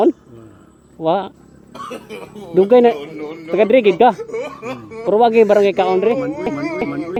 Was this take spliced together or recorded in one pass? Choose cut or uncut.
uncut